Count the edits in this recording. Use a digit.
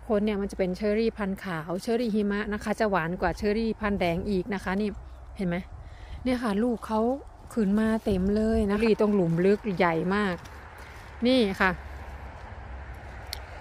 1